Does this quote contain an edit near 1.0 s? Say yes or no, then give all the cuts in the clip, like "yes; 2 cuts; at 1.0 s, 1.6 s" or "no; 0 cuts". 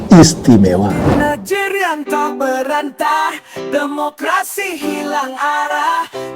yes; 1 cut; at 1.0 s